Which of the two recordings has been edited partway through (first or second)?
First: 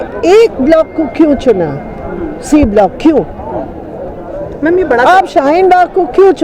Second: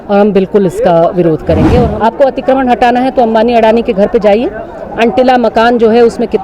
second